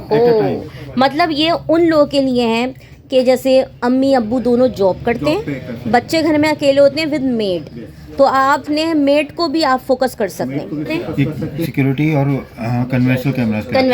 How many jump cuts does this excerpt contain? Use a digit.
1